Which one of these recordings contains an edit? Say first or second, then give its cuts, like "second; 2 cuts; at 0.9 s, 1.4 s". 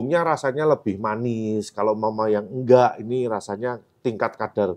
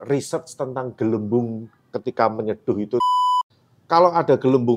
second; 1 cut; at 3.3 s